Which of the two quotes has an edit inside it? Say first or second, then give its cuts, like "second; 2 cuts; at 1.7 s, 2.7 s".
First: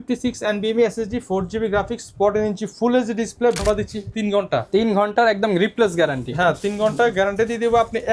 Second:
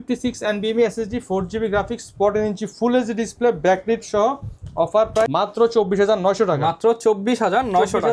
first; 1 cut; at 3.6 s